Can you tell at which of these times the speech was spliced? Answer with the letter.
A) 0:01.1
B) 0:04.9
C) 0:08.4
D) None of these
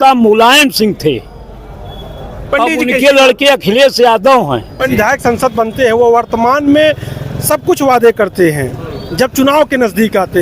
B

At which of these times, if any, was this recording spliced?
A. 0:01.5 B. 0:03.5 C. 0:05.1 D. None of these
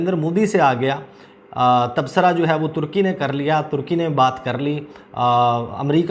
D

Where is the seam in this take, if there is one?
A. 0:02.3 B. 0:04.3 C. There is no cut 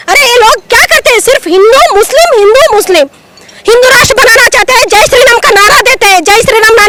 C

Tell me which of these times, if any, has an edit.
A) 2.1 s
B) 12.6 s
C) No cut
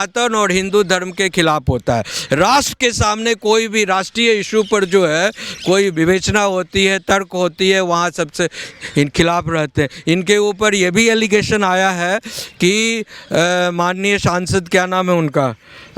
C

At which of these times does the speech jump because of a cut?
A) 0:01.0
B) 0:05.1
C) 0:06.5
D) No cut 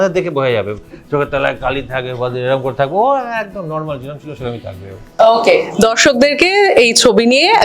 D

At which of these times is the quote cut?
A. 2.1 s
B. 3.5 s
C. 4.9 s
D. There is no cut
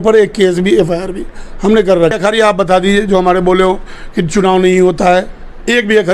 A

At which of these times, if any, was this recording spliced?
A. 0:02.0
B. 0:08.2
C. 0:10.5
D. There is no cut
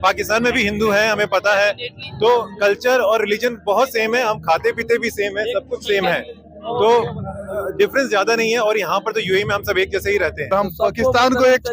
C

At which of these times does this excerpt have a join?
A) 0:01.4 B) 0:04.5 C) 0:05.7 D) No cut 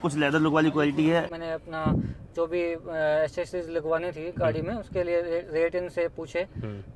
A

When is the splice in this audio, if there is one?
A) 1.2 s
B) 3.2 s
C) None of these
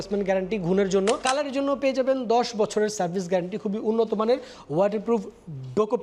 A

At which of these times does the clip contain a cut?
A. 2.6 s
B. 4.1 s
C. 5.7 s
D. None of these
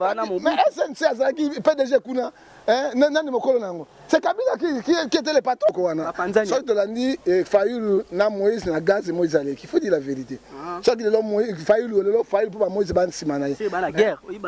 C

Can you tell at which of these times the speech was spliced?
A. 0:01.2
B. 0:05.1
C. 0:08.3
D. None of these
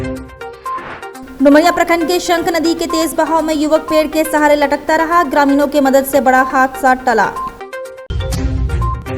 A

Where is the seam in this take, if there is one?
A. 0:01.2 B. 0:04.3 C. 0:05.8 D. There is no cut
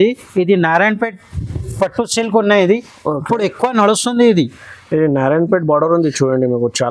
D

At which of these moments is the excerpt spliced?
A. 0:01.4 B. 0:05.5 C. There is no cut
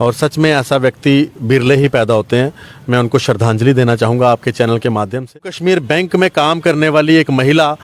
B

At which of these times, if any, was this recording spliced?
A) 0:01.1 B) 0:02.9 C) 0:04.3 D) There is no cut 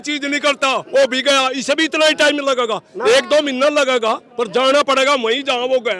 D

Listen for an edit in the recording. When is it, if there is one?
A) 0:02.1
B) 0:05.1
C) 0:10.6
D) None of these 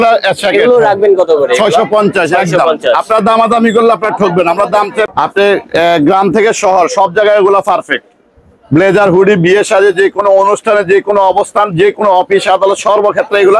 B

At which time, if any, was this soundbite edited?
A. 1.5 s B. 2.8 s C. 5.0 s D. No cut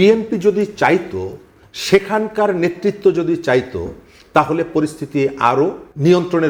D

